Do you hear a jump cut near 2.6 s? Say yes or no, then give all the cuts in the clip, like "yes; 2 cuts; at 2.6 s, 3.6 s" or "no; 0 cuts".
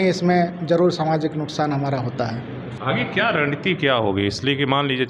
yes; 1 cut; at 2.6 s